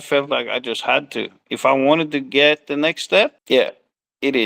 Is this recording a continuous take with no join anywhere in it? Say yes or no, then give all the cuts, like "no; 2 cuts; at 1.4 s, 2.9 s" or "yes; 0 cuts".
no; 1 cut; at 3.4 s